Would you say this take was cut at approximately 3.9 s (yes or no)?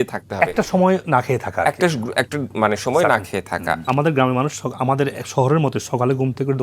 yes